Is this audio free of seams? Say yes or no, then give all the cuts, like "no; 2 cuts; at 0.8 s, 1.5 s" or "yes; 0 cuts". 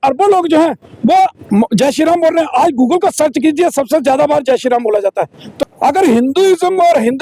no; 1 cut; at 5.6 s